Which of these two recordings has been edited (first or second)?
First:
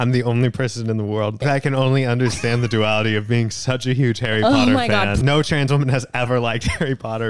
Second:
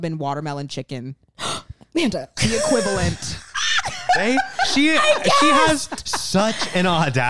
first